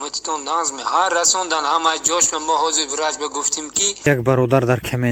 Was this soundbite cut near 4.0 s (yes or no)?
yes